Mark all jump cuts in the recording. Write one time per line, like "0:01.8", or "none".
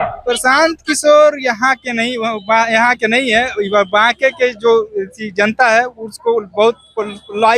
none